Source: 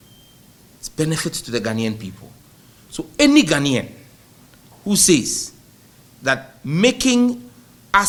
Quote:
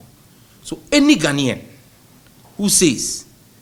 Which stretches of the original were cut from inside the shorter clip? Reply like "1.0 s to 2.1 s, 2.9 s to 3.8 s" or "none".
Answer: none